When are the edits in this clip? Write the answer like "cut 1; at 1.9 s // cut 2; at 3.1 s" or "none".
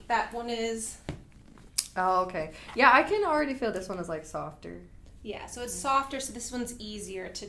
none